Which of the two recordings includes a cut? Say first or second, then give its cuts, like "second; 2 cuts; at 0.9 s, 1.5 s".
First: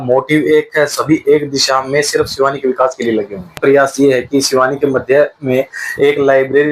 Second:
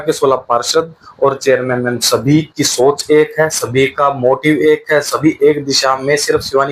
first; 1 cut; at 3.5 s